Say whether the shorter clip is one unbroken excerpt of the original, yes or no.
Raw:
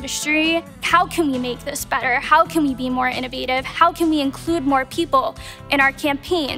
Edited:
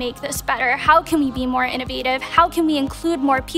yes